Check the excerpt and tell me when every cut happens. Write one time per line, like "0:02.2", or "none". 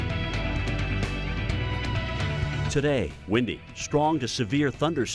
0:02.7